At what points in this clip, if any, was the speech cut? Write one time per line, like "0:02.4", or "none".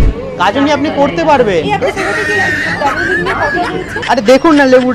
0:04.0